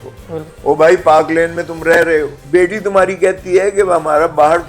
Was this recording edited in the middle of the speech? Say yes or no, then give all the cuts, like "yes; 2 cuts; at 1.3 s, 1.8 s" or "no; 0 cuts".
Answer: yes; 1 cut; at 2.4 s